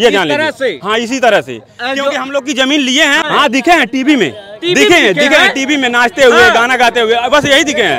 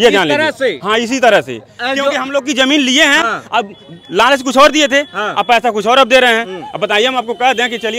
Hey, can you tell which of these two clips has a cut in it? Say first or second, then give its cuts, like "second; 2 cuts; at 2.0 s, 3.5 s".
first; 1 cut; at 3.2 s